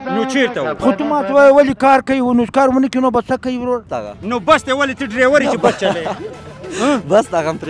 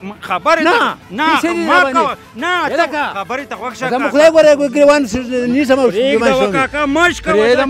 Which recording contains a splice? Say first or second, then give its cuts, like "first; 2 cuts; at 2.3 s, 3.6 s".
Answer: first; 1 cut; at 3.9 s